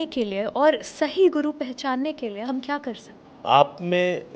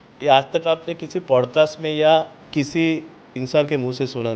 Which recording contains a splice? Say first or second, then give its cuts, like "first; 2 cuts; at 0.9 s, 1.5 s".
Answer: first; 1 cut; at 3.1 s